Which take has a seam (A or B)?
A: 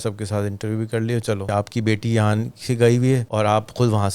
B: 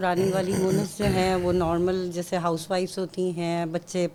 A